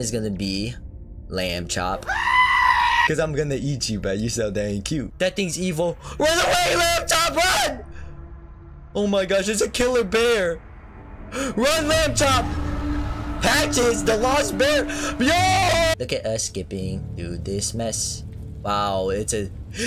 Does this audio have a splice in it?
yes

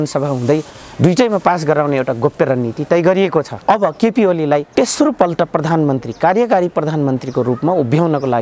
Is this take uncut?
no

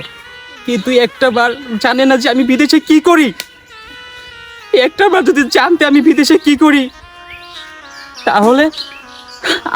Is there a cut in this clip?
no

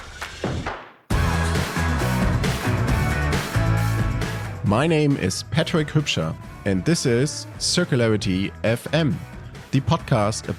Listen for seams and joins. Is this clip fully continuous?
yes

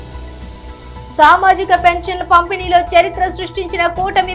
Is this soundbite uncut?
no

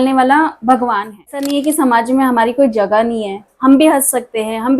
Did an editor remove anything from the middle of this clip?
yes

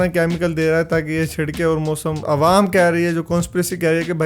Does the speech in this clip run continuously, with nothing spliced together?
no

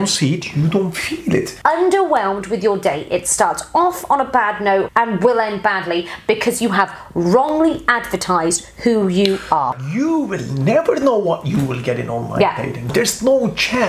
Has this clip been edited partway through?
yes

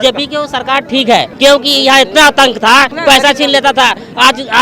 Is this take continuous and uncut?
no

